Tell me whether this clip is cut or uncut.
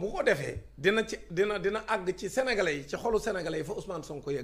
uncut